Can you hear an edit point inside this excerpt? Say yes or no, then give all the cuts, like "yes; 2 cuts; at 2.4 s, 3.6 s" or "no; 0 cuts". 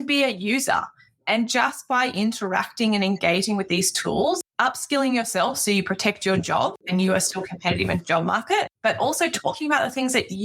yes; 3 cuts; at 4.5 s, 6.8 s, 8.7 s